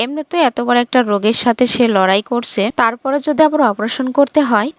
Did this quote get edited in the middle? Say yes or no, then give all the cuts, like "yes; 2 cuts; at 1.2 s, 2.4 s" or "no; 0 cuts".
no; 0 cuts